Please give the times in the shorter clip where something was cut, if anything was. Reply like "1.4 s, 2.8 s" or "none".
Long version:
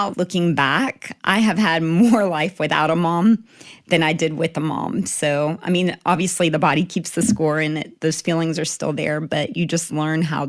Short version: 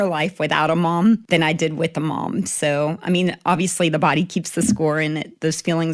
1.2 s